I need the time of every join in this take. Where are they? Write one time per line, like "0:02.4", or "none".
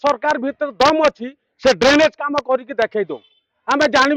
none